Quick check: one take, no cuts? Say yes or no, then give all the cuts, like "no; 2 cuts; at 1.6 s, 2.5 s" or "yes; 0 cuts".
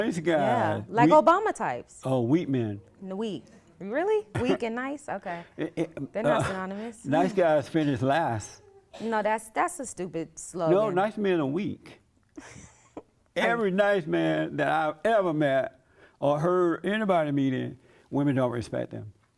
yes; 0 cuts